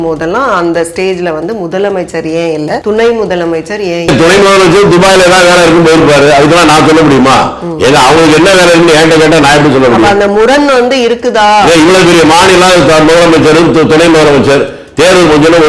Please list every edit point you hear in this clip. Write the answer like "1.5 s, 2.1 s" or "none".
2.8 s, 4.1 s